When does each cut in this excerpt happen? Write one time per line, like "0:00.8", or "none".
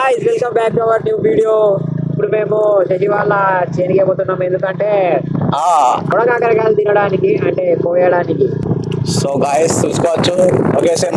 0:06.1
0:08.6

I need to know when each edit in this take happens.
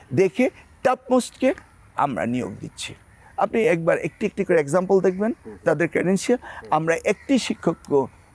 none

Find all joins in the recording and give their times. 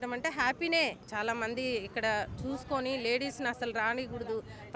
0:01.0

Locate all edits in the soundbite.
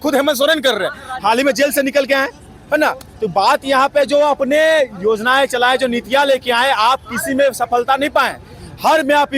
none

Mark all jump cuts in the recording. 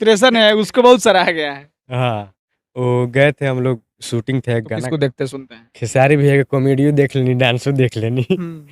0:04.8

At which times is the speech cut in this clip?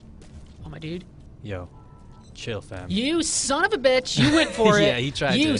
none

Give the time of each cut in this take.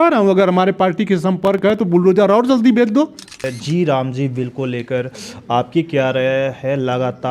0:03.5

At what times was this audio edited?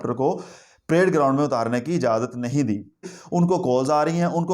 0:03.2

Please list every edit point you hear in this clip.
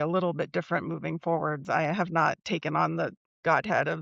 0:01.6

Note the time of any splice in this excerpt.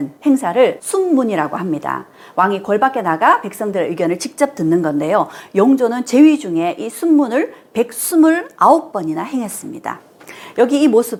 none

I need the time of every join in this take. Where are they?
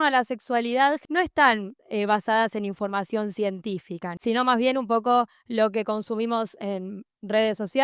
0:01.0
0:04.1

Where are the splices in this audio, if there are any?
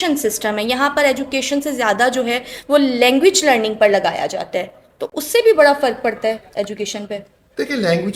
none

